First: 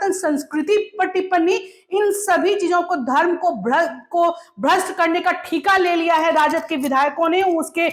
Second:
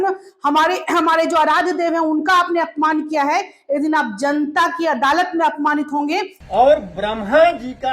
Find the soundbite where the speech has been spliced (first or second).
second